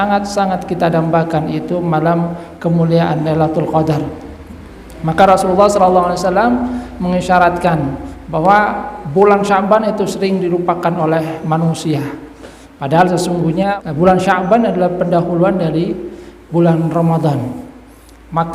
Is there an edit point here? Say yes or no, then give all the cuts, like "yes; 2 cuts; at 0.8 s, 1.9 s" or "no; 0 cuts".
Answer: yes; 1 cut; at 13.8 s